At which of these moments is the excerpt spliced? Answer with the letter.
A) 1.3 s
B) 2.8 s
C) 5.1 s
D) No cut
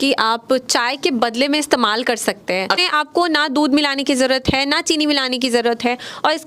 B